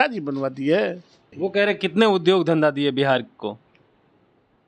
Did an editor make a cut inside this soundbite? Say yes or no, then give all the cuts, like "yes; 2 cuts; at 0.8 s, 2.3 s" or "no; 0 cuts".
yes; 1 cut; at 1.2 s